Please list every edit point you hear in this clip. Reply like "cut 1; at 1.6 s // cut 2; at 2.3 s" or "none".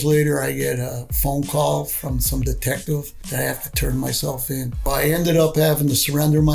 cut 1; at 3.2 s // cut 2; at 4.9 s